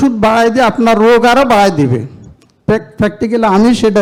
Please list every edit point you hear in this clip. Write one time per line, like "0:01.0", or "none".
none